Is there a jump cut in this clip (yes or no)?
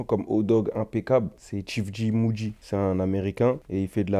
no